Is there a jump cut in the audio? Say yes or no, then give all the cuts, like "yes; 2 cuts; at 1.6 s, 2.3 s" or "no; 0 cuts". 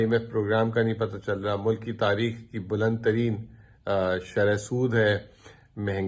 no; 0 cuts